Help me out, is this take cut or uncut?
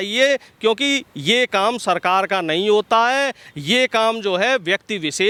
uncut